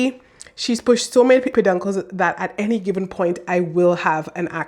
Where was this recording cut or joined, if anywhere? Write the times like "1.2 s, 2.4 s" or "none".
1.5 s